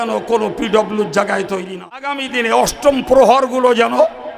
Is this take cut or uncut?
cut